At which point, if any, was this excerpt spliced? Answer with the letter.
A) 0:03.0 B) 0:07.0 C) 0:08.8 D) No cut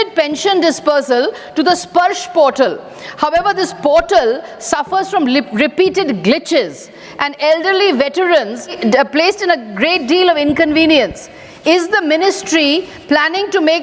C